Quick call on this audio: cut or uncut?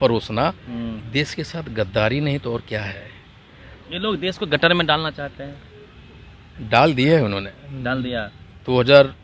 uncut